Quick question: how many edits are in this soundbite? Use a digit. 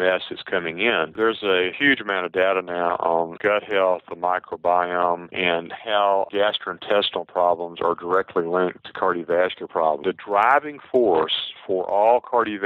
2